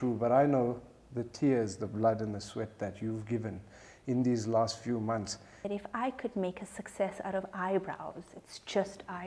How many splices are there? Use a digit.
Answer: 1